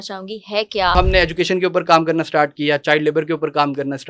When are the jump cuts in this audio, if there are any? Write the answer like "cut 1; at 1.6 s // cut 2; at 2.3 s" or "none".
cut 1; at 0.9 s